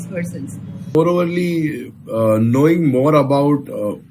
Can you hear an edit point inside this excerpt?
yes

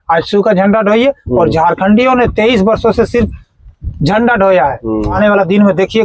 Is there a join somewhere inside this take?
yes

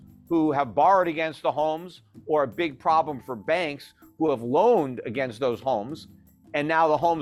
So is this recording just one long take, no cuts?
yes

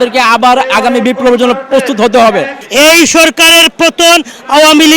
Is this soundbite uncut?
no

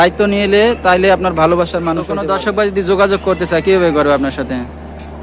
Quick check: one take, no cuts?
no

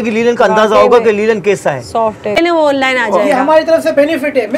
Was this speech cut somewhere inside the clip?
yes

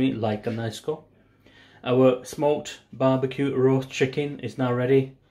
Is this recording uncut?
yes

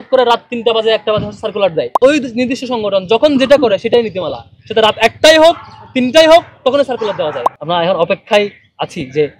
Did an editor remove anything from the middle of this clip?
yes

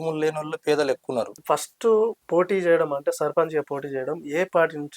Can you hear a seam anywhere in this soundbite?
yes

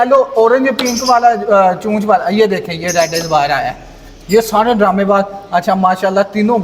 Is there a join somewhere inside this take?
no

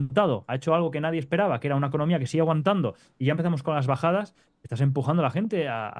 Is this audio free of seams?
yes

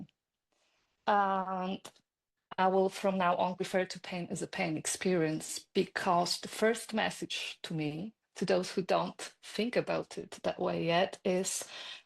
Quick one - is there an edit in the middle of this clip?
yes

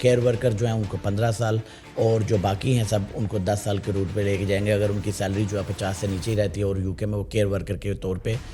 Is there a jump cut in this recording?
no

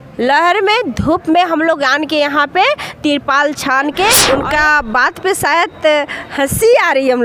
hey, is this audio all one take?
no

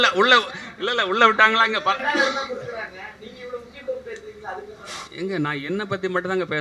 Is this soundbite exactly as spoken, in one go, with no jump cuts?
yes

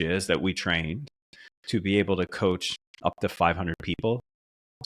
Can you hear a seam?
no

